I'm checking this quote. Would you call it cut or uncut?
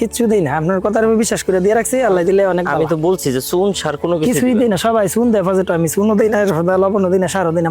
uncut